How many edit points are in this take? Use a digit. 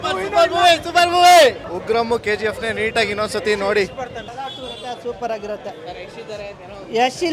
2